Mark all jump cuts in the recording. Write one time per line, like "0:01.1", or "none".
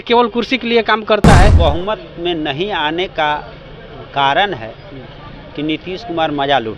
0:01.6